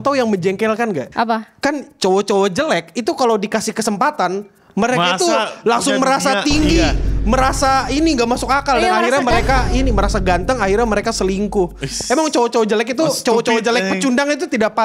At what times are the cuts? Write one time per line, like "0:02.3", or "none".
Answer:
0:01.1

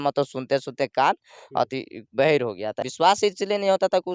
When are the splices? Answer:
0:02.8

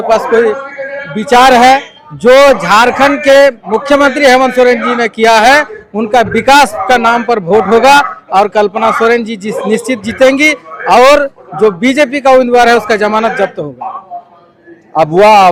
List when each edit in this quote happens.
none

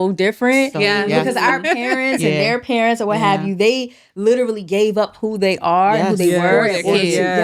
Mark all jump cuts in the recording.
none

